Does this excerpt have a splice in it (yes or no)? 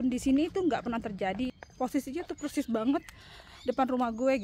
yes